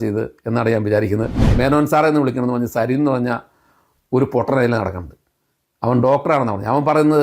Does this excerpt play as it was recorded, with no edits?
no; 1 cut; at 1.4 s

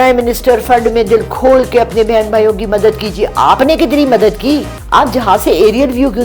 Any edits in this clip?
yes; 1 cut; at 4.7 s

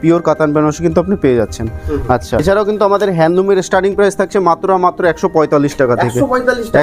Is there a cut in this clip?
yes; 1 cut; at 2.4 s

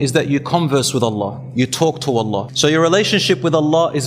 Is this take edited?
yes; 1 cut; at 2.5 s

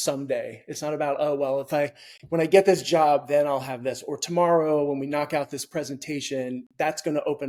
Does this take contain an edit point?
no; 0 cuts

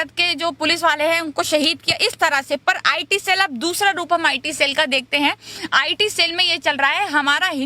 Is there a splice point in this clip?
no; 0 cuts

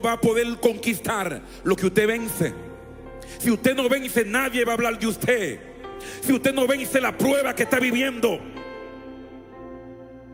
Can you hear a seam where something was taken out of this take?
no; 0 cuts

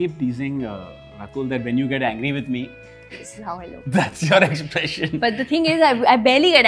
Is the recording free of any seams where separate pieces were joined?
yes; 0 cuts

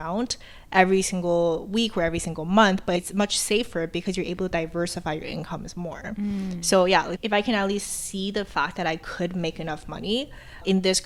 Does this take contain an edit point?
no; 0 cuts

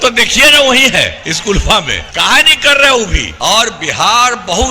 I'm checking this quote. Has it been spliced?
yes; 3 cuts; at 1.2 s, 2.0 s, 3.2 s

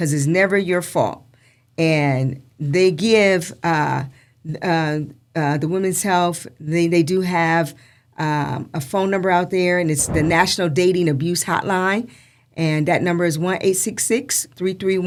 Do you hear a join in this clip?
no; 0 cuts

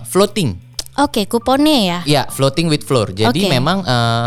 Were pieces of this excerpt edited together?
no; 0 cuts

